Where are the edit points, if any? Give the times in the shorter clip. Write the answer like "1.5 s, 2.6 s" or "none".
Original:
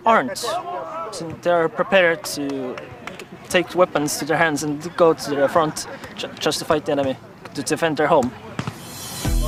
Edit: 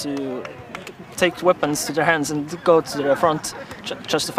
none

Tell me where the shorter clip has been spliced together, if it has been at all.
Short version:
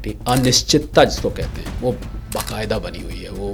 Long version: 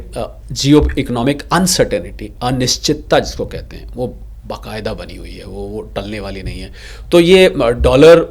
none

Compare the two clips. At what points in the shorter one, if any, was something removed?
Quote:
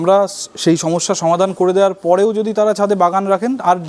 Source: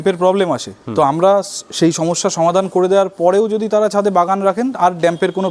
none

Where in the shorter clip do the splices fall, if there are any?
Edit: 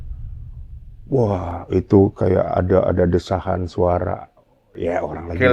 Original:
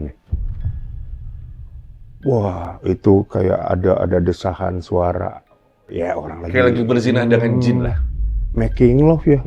0.9 s

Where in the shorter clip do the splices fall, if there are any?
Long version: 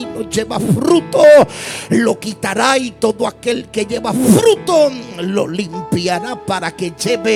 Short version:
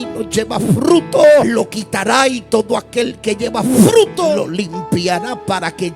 1.5 s, 4.3 s

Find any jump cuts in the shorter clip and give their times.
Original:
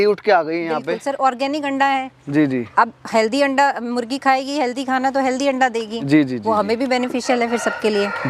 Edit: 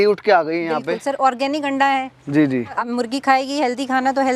2.8 s

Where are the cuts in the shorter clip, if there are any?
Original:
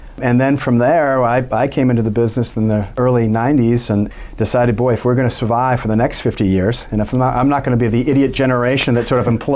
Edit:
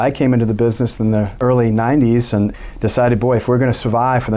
none

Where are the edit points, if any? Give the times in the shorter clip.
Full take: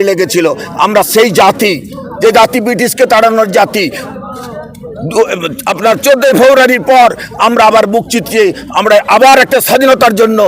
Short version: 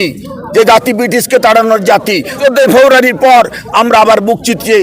2.4 s

